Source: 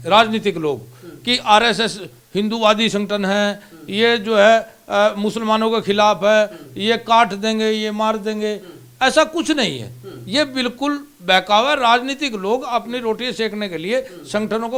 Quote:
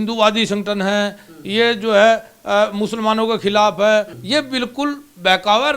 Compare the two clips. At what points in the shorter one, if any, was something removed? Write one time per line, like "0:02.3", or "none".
0:04.2

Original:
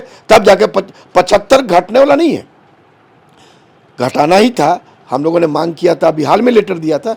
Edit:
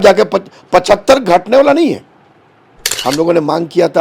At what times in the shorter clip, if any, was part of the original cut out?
0:02.9

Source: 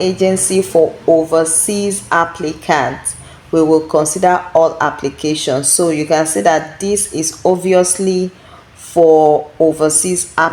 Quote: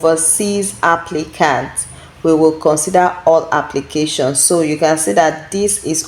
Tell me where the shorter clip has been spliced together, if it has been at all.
none

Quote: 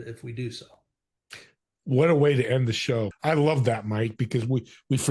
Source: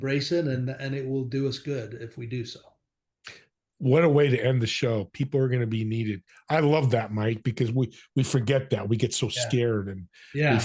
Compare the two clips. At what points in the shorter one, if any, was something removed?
0:03.1

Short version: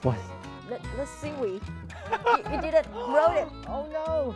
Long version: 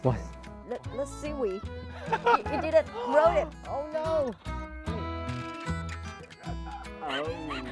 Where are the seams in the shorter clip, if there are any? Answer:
none

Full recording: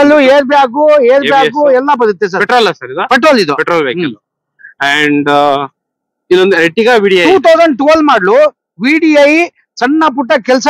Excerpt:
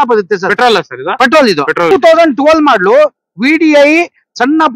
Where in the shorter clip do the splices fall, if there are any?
0:01.9

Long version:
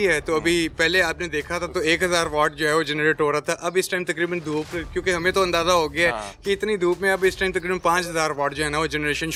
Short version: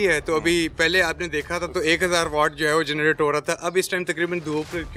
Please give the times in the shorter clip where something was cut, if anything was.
none

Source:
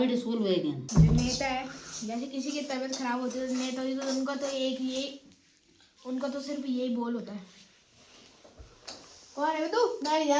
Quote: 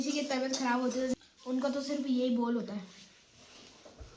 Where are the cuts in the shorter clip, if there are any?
0:01.1

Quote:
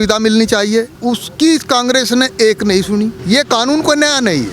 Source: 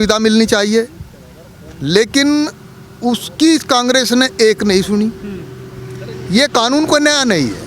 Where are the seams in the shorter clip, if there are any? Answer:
0:00.9
0:03.2

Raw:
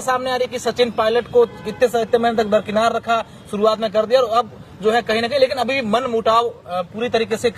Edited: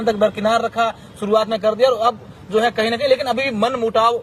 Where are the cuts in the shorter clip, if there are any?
none

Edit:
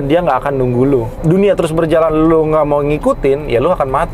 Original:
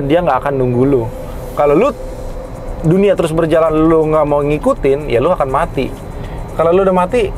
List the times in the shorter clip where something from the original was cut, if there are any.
0:01.1

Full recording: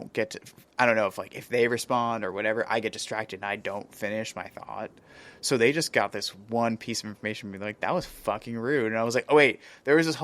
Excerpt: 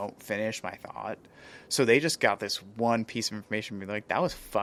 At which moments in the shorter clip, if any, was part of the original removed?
none

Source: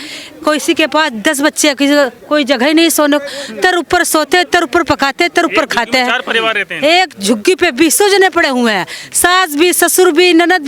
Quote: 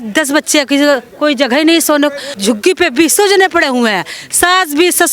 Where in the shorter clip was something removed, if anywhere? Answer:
0:02.3

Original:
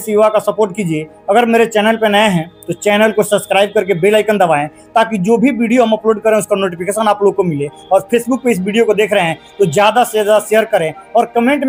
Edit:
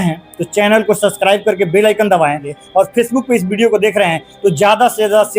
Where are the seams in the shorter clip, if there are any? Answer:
0:02.5

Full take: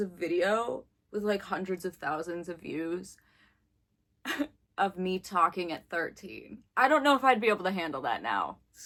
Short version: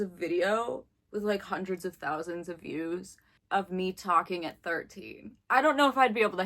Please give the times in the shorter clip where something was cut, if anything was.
0:03.3

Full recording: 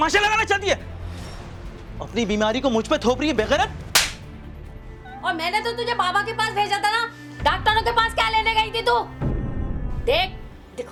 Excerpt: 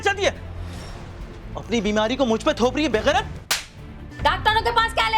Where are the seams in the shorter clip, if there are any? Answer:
0:04.0

